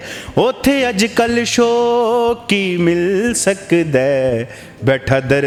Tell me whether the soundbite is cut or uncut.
uncut